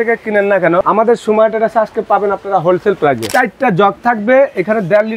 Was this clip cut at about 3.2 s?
yes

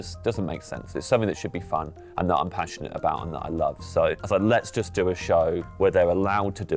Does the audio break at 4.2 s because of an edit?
yes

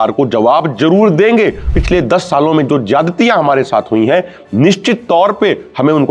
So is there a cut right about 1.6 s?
yes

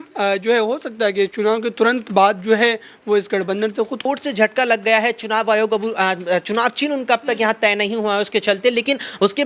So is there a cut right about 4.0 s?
yes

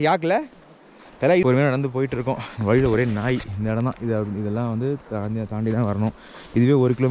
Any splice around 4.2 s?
no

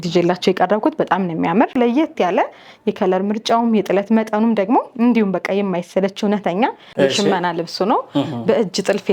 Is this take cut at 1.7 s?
yes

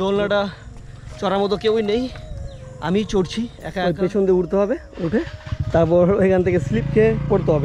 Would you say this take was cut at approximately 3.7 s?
yes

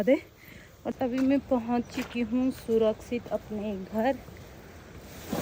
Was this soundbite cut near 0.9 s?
yes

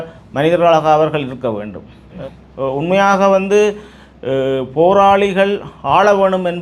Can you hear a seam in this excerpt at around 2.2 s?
yes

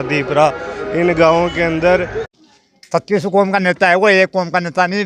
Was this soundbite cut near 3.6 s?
no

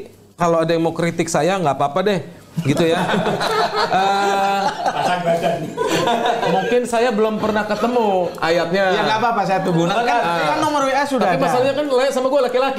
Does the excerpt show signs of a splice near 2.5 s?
no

